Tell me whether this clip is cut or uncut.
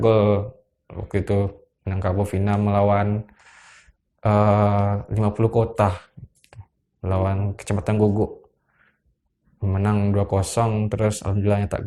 uncut